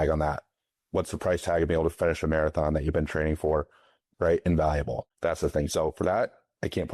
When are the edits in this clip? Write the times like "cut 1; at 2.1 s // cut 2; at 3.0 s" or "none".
cut 1; at 4.0 s // cut 2; at 5.0 s